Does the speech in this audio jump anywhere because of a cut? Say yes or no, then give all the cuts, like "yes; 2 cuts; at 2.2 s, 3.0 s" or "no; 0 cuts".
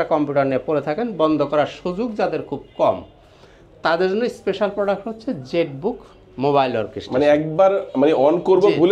no; 0 cuts